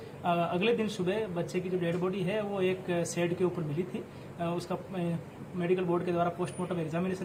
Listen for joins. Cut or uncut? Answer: uncut